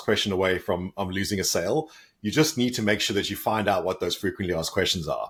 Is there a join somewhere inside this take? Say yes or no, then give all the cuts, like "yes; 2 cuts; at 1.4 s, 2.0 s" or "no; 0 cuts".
no; 0 cuts